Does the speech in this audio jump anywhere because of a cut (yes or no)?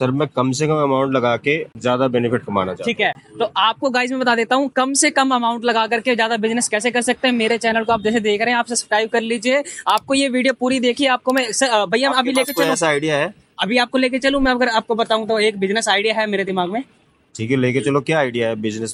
no